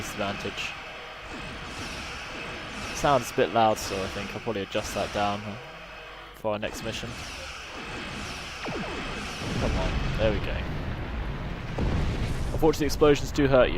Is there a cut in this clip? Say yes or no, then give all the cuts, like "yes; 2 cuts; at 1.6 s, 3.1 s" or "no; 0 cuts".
yes; 1 cut; at 5.4 s